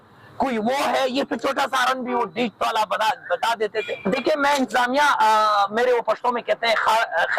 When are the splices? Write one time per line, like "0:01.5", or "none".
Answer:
0:04.1